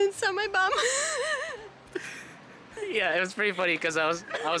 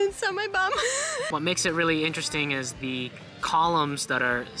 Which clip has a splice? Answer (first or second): second